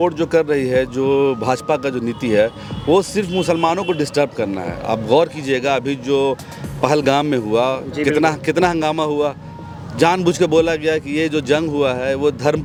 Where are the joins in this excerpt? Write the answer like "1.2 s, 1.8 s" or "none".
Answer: none